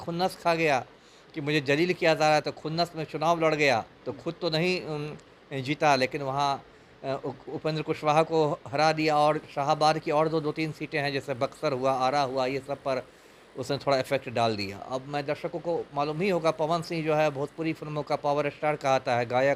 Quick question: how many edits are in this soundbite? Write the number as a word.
zero